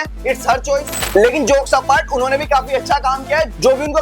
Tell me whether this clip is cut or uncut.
uncut